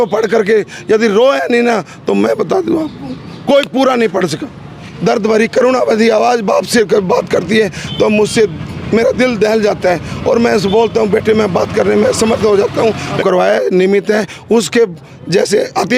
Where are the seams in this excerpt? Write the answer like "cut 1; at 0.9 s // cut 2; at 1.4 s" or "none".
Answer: cut 1; at 4.8 s // cut 2; at 13.2 s